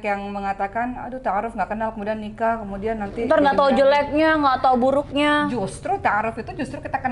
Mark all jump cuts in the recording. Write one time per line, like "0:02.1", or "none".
none